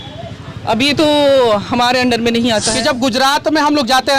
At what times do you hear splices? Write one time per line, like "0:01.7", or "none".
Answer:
0:02.7